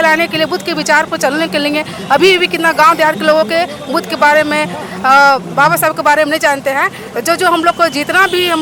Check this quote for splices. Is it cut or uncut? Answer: uncut